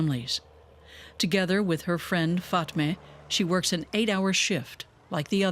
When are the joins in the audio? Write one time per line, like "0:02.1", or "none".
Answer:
0:02.0